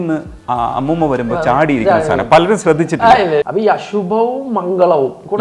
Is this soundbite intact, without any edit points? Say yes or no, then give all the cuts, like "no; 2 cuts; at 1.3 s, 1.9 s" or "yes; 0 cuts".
no; 1 cut; at 3.5 s